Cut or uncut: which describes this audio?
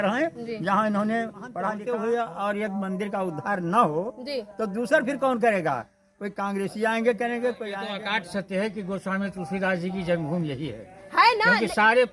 cut